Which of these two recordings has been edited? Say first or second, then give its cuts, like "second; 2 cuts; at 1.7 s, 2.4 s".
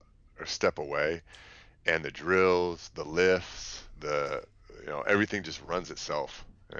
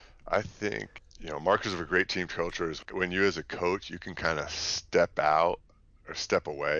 second; 2 cuts; at 0.9 s, 2.9 s